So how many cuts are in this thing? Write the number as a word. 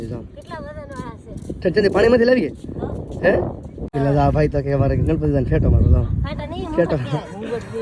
one